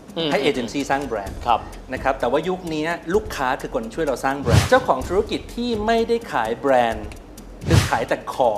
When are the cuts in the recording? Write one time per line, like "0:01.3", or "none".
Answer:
0:04.6